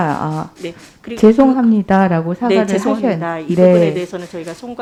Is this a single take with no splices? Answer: yes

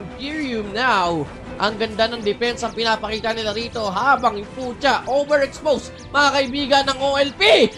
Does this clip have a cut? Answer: no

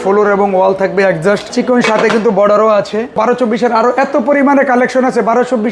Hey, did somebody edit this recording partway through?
yes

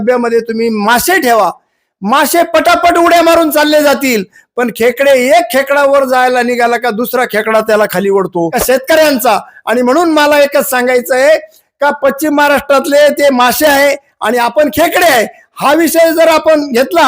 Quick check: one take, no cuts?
no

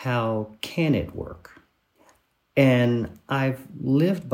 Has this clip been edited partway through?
yes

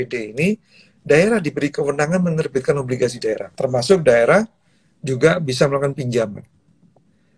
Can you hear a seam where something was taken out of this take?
yes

